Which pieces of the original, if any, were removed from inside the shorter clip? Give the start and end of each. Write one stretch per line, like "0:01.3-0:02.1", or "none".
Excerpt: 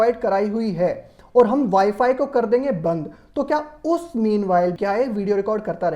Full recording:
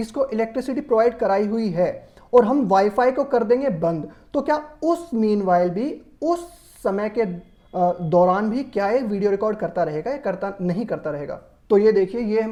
0:05.7-0:08.7